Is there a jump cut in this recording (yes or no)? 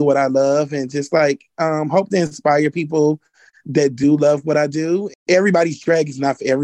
yes